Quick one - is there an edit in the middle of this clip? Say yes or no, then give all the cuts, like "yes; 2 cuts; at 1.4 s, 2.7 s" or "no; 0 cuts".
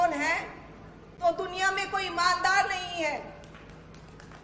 no; 0 cuts